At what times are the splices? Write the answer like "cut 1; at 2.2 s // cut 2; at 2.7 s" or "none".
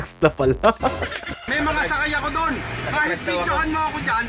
cut 1; at 1.4 s